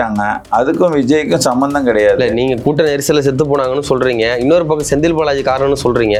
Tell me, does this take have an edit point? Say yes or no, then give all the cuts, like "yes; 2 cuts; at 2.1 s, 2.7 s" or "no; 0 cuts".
no; 0 cuts